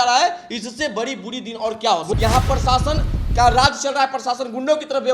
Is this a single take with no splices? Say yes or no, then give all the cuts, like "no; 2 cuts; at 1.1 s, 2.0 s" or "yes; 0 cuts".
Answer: no; 1 cut; at 2.1 s